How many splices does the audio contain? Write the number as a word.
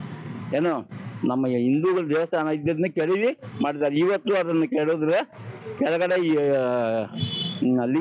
zero